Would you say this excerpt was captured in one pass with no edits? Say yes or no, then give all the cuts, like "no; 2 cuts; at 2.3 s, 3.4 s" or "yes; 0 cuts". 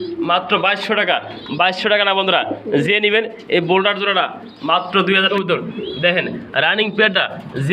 no; 1 cut; at 5.3 s